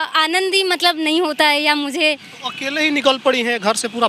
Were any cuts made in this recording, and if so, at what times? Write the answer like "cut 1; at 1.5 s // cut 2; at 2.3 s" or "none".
none